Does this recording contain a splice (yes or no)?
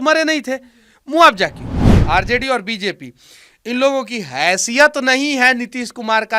yes